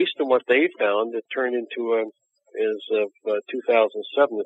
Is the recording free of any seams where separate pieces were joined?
no; 1 cut; at 1.3 s

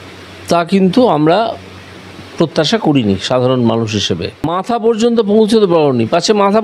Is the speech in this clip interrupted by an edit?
yes; 1 cut; at 4.3 s

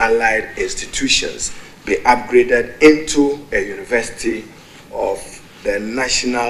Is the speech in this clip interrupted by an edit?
no; 0 cuts

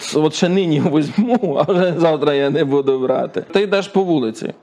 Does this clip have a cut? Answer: yes; 1 cut; at 3.5 s

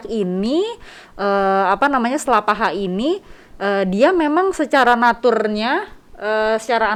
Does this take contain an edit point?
no; 0 cuts

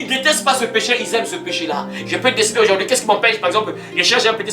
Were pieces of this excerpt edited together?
yes; 1 cut; at 1.9 s

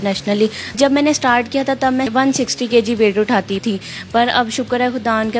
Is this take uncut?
no; 3 cuts; at 0.8 s, 2.1 s, 3.6 s

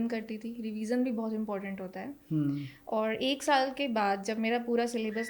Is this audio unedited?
yes; 0 cuts

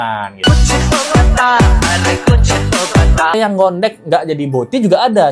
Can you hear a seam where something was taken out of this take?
yes; 1 cut; at 3.3 s

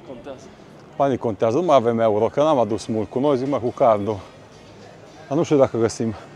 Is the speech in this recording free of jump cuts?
yes; 0 cuts

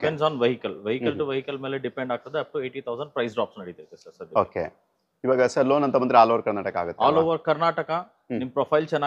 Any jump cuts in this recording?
no; 0 cuts

